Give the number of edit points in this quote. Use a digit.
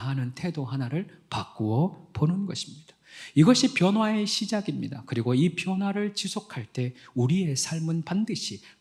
0